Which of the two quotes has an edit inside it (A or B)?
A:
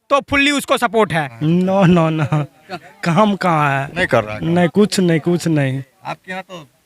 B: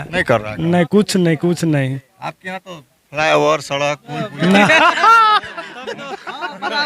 A